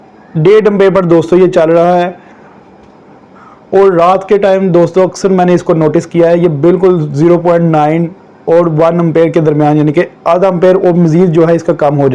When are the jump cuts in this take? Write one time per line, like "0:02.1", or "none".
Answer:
none

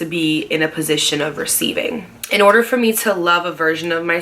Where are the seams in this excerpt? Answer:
0:02.2

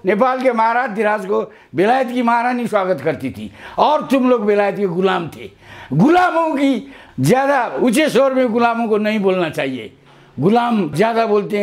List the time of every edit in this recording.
none

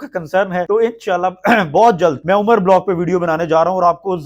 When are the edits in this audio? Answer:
none

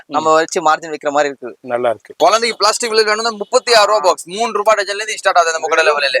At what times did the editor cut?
0:02.1

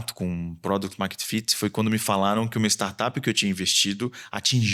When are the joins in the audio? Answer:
none

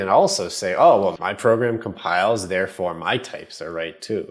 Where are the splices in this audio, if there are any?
0:01.2

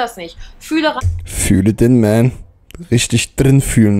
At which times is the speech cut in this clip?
none

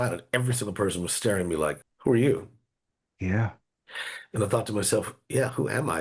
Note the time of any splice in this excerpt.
0:01.8

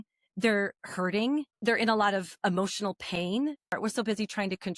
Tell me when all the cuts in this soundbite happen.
0:01.5
0:03.8

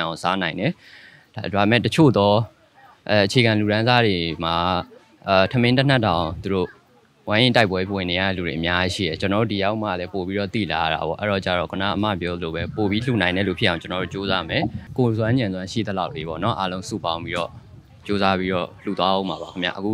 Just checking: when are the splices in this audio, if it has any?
0:14.8

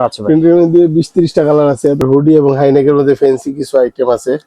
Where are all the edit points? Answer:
0:02.0

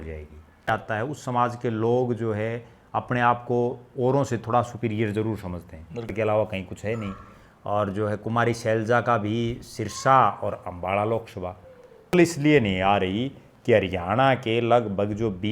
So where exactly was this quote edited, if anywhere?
0:00.7
0:06.1
0:12.1

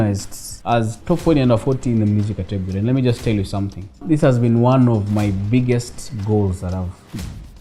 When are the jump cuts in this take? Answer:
0:04.0

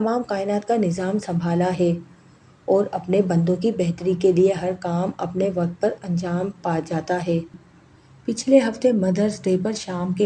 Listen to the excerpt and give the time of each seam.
0:07.7

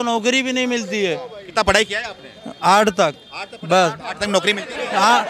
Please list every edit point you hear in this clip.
none

